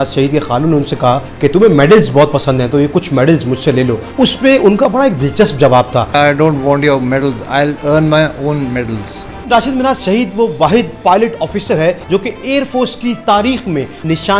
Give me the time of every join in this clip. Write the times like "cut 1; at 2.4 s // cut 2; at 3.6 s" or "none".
cut 1; at 4.1 s // cut 2; at 6.1 s // cut 3; at 9.5 s